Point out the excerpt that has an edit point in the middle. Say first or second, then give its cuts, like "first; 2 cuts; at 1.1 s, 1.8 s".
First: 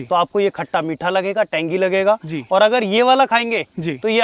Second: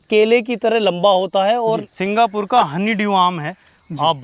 second; 1 cut; at 1.9 s